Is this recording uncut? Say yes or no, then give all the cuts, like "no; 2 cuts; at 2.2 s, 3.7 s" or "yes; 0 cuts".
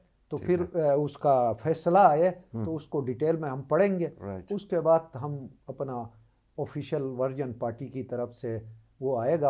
yes; 0 cuts